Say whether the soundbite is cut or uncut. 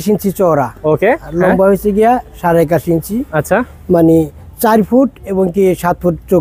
uncut